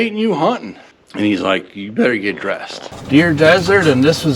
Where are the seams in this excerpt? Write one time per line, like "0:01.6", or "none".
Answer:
0:02.9